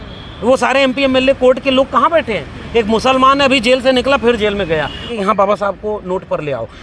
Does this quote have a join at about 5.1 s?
yes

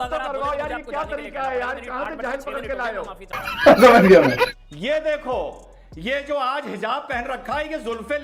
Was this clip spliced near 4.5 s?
yes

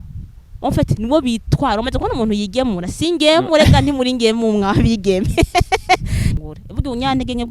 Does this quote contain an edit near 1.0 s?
no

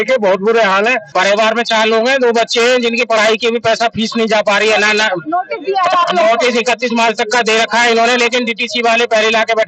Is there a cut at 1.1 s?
yes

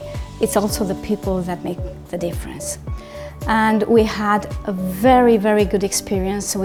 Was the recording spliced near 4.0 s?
no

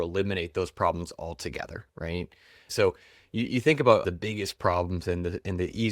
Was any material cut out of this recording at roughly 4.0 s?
yes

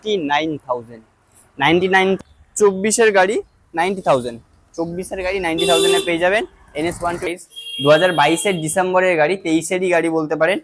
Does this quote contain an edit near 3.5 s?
no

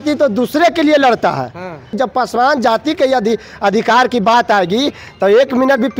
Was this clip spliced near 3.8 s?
no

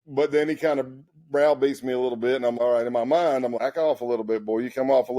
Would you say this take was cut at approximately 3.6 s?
yes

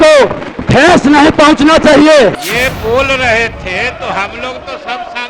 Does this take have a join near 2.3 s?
yes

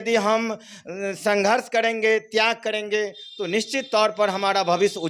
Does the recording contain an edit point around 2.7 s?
no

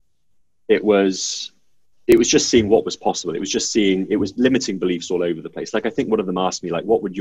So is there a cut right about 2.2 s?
yes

